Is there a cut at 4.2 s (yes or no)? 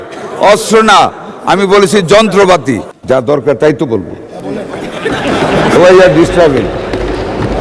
no